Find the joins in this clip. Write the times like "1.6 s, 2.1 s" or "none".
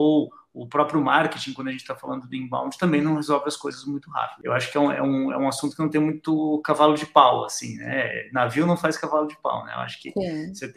4.3 s